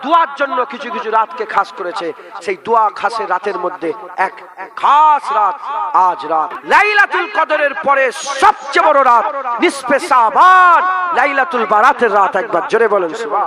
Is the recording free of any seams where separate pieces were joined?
no; 1 cut; at 6.6 s

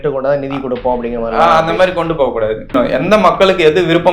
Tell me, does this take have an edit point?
yes; 1 cut; at 2.7 s

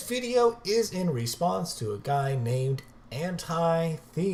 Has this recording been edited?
no; 0 cuts

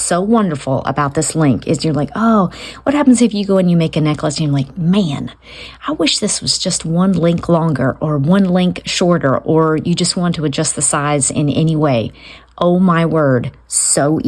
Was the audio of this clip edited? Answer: no; 0 cuts

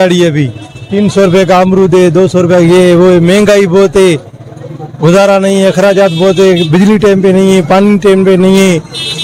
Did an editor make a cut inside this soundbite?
no; 0 cuts

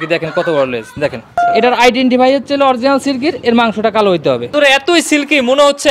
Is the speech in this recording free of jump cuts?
no; 2 cuts; at 1.3 s, 4.5 s

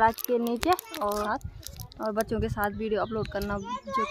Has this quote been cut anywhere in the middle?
yes; 1 cut; at 1.2 s

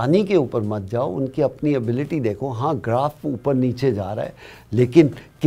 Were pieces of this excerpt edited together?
no; 0 cuts

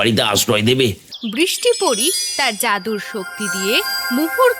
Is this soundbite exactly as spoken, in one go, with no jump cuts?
no; 1 cut; at 1.1 s

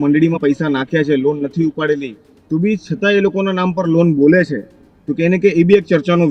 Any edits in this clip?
no; 0 cuts

